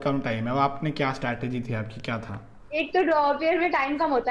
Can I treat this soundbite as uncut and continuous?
yes; 0 cuts

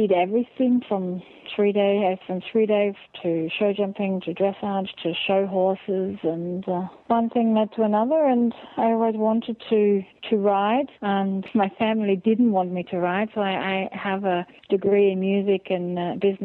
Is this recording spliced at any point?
yes; 3 cuts; at 6.9 s, 11.4 s, 14.5 s

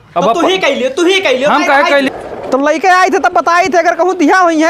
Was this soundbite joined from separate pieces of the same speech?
yes; 1 cut; at 2.1 s

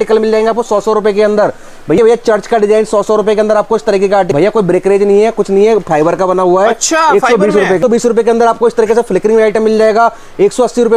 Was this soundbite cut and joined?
yes; 3 cuts; at 2.0 s, 4.3 s, 7.8 s

